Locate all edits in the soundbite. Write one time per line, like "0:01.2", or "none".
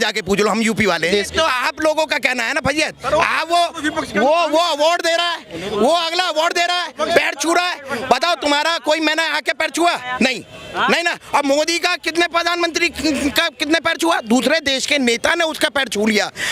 0:01.0

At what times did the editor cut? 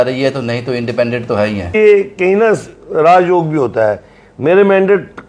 0:01.7

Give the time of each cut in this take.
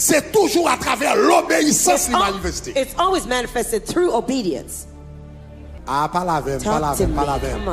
0:05.7

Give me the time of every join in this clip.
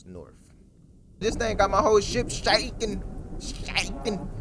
0:01.2

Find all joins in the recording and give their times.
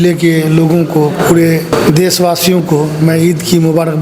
0:01.7

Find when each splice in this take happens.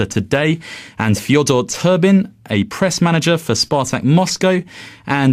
none

